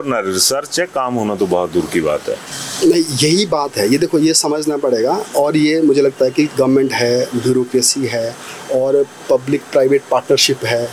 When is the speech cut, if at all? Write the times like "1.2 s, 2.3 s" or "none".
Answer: none